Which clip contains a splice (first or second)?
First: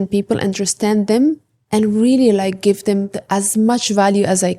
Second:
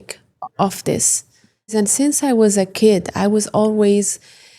second